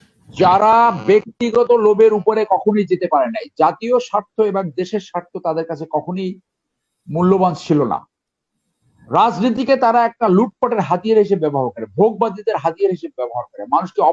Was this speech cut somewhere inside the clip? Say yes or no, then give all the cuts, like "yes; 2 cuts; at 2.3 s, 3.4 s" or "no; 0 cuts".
no; 0 cuts